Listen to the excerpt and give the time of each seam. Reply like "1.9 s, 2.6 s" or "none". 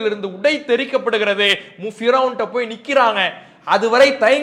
none

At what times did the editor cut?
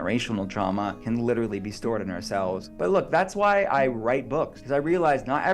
1.0 s, 2.7 s, 4.6 s

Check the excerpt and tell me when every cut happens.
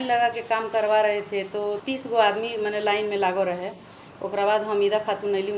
1.8 s

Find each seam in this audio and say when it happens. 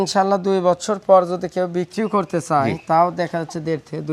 none

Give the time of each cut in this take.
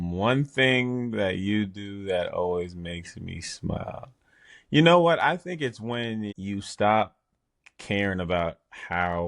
6.4 s

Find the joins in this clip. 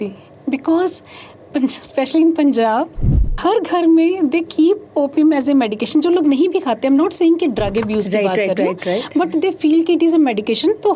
3.3 s

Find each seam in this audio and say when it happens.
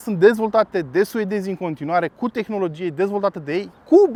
none

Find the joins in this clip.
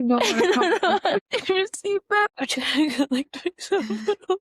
1.2 s, 2.3 s

